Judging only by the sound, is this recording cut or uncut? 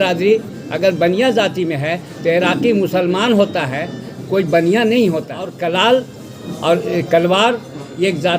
cut